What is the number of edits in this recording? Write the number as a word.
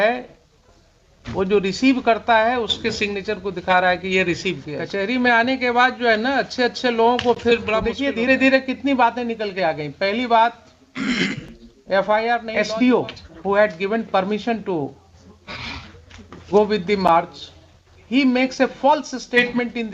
three